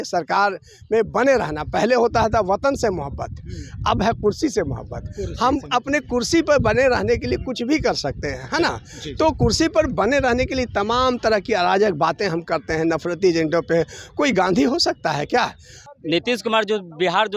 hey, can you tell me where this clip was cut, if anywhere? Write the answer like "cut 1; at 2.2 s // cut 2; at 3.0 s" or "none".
cut 1; at 15.8 s